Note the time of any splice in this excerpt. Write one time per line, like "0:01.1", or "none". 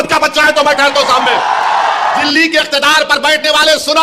0:02.3